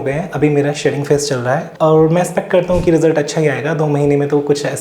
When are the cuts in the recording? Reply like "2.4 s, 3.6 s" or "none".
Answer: 1.7 s